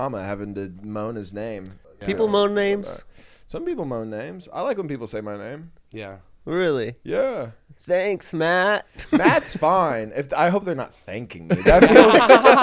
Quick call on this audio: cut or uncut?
cut